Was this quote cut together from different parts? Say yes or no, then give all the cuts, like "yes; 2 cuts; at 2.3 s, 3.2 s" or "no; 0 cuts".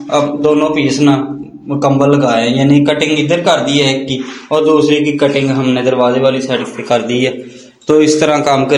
no; 0 cuts